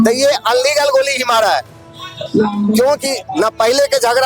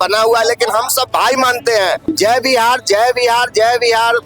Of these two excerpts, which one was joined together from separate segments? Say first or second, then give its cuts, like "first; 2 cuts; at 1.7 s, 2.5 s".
second; 1 cut; at 2.0 s